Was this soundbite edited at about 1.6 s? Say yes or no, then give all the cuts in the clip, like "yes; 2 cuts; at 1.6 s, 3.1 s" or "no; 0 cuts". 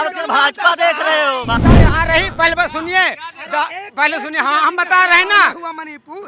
yes; 1 cut; at 1.6 s